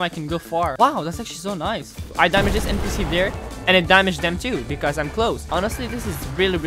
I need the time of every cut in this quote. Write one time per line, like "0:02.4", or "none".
0:02.1
0:05.4